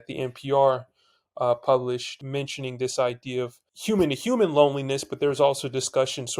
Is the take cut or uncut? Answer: uncut